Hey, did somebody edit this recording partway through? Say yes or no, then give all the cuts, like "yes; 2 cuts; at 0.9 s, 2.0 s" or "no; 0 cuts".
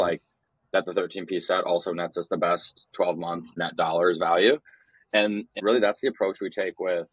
yes; 2 cuts; at 3.5 s, 5.5 s